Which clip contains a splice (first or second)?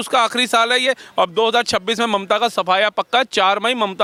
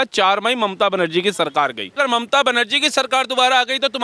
second